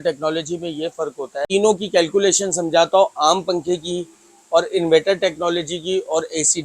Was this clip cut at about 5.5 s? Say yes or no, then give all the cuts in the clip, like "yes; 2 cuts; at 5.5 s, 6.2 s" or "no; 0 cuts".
no; 1 cut; at 1.4 s